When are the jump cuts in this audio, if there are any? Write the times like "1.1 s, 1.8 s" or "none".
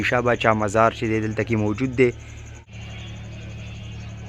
none